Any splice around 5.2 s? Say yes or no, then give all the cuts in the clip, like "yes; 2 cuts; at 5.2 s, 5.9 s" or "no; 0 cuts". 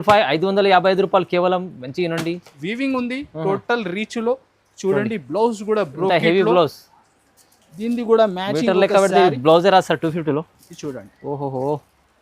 no; 1 cut; at 2.6 s